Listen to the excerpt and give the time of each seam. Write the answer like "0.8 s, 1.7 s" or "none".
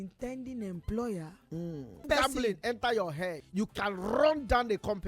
2.0 s, 3.4 s